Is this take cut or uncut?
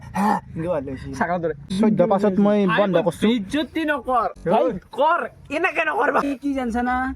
cut